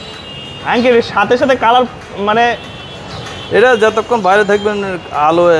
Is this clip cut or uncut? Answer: uncut